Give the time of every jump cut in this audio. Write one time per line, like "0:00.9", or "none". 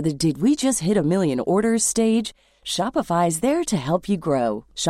none